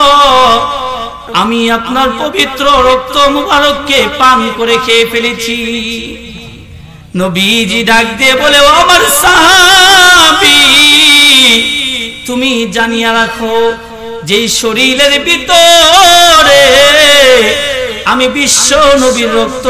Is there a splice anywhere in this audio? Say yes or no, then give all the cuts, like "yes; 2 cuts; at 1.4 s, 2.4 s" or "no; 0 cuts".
yes; 1 cut; at 1.2 s